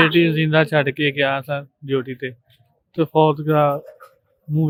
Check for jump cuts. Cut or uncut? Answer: uncut